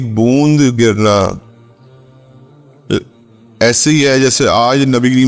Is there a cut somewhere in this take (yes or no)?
yes